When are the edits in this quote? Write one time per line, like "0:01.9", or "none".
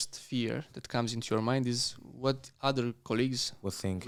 none